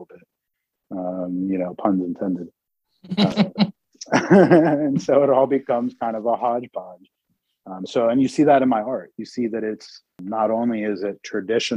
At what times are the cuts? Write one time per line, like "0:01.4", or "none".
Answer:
0:03.3
0:10.2